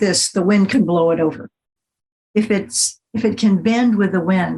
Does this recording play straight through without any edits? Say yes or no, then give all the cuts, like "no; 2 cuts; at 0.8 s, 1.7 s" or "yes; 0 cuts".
yes; 0 cuts